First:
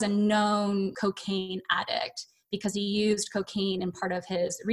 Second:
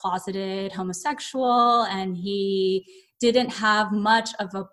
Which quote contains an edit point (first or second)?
first